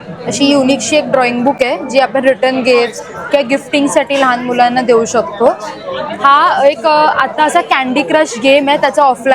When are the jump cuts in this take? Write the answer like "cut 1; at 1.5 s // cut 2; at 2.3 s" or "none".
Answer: none